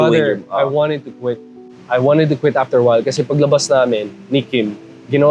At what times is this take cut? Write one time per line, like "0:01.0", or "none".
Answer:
none